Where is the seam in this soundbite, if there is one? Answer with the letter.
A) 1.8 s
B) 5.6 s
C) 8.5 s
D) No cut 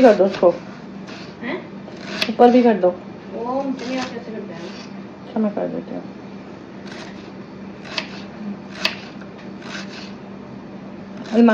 D